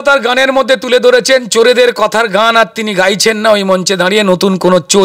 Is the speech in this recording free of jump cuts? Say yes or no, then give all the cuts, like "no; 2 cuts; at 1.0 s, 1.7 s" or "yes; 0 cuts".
yes; 0 cuts